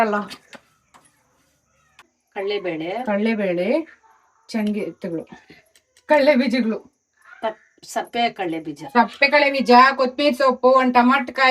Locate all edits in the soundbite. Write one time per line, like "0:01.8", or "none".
0:02.2